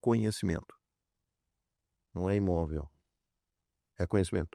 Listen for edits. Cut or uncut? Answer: uncut